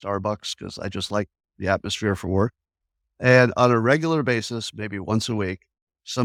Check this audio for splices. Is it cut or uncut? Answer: uncut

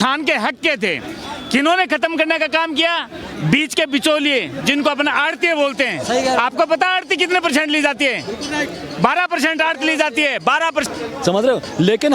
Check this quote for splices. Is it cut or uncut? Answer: cut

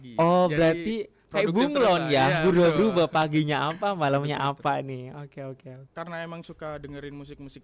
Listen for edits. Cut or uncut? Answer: cut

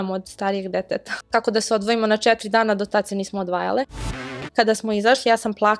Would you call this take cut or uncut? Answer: cut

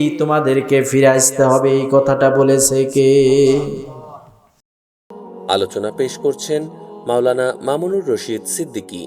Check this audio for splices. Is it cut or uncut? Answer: cut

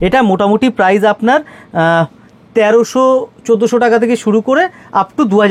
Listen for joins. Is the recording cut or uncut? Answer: uncut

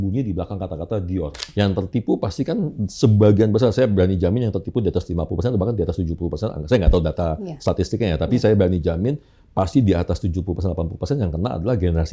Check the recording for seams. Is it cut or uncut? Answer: cut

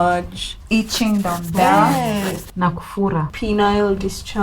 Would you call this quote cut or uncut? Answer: cut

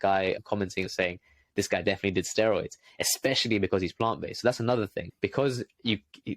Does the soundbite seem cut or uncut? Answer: cut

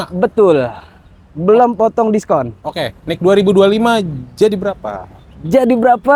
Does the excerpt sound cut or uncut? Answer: uncut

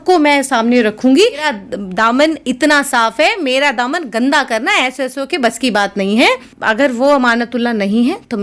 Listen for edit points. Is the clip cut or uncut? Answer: cut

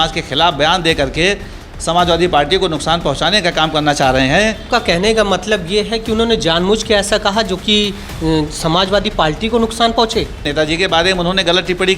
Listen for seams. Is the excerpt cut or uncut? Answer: cut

